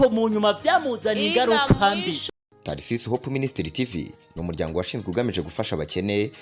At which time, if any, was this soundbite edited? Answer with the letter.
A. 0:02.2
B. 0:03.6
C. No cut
A